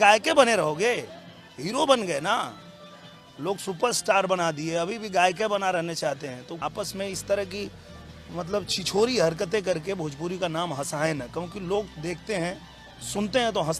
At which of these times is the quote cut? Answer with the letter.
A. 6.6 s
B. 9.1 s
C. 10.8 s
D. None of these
A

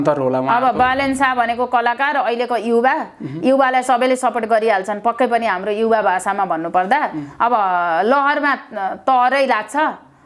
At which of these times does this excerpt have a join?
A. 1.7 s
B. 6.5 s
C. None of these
C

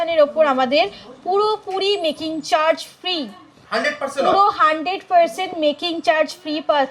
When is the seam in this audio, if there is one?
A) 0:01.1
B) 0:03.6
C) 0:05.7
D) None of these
D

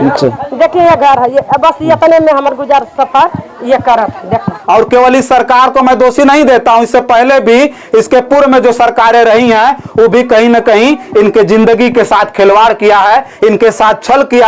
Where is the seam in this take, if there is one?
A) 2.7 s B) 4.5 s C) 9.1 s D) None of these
B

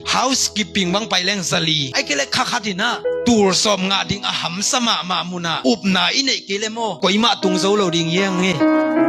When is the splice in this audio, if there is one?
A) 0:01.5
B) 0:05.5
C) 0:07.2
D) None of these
D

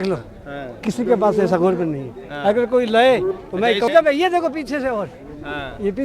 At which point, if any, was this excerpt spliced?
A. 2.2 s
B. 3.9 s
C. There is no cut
B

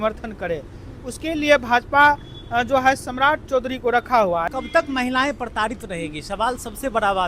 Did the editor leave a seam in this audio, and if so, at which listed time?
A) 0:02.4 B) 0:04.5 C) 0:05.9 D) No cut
B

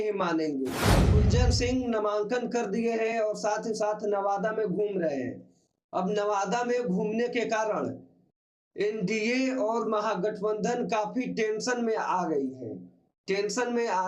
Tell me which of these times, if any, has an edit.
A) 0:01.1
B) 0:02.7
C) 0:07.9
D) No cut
A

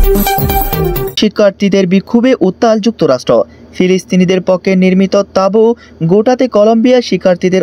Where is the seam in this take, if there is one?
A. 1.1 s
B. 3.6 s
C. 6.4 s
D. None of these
A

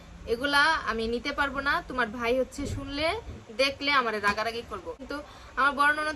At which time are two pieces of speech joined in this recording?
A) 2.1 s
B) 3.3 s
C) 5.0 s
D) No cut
C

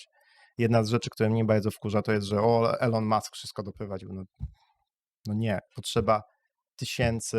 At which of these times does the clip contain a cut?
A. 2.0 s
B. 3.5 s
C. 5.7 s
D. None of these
C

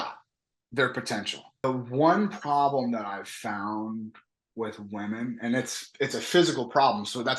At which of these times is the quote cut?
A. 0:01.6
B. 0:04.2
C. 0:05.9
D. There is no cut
A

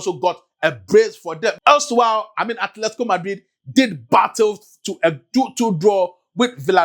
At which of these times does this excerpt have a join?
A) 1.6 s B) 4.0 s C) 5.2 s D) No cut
A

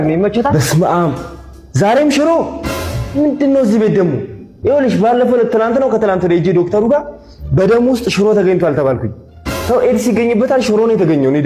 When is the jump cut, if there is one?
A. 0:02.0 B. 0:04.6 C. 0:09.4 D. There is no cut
D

